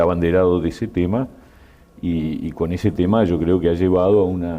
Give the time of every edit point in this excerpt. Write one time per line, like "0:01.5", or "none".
0:01.4